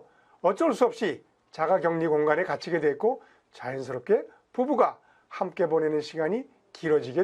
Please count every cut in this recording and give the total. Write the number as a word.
zero